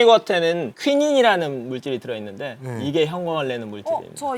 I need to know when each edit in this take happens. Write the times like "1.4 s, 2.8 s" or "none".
none